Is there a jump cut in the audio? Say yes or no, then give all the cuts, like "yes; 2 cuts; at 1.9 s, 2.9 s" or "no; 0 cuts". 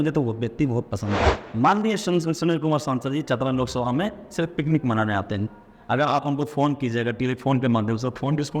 yes; 1 cut; at 1.3 s